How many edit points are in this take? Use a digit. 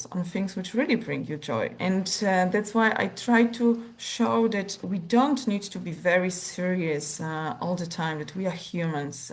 0